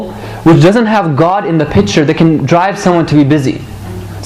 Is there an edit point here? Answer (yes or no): yes